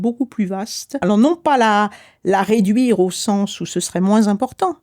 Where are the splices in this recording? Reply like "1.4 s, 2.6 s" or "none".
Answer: 1.0 s